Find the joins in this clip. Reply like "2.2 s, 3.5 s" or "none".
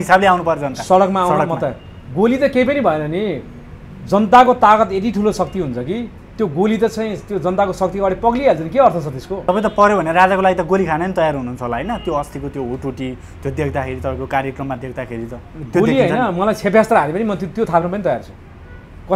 9.2 s